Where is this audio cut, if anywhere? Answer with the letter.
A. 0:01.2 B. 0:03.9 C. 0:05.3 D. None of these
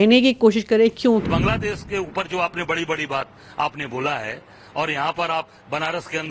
A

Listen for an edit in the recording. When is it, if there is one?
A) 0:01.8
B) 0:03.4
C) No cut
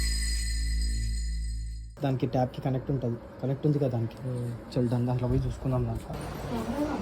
A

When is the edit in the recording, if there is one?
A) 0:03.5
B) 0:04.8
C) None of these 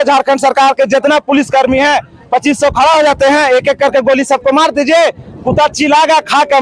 C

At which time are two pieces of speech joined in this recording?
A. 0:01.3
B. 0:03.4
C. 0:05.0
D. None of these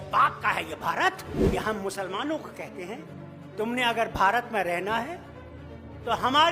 A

